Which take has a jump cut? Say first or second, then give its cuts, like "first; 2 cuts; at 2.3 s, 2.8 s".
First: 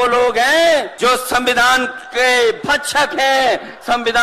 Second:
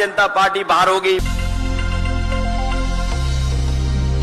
first; 1 cut; at 0.9 s